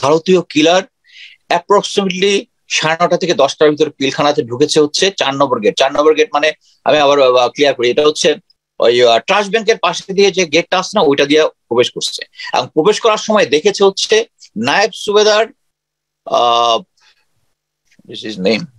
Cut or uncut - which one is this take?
uncut